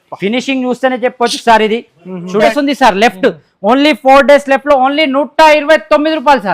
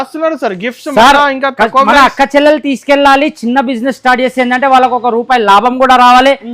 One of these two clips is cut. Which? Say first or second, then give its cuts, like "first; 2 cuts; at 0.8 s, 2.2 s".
first; 1 cut; at 2.5 s